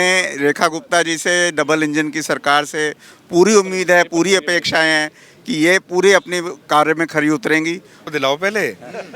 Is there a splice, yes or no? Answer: yes